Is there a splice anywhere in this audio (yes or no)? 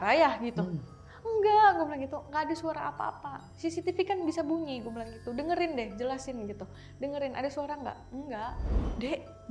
yes